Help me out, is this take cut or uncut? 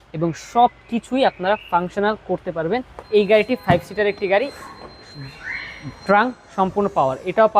cut